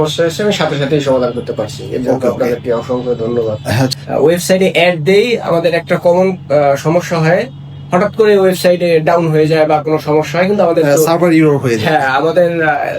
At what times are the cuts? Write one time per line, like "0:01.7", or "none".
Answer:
0:03.9